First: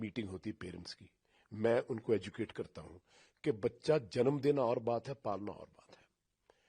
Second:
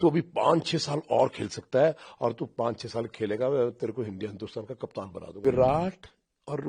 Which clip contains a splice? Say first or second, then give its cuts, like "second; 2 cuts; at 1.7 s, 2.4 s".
second; 1 cut; at 5.4 s